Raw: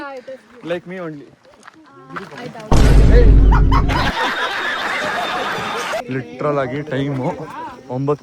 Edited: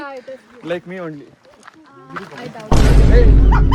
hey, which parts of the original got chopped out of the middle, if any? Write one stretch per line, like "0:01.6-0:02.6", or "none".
none